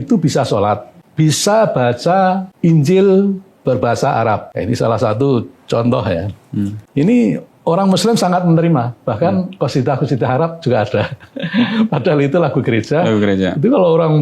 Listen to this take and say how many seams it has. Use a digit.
4